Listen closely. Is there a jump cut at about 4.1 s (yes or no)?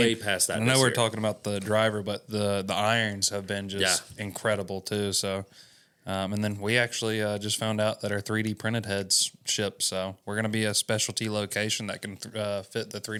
no